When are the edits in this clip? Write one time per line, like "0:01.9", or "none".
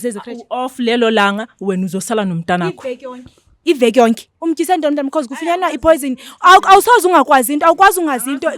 0:04.3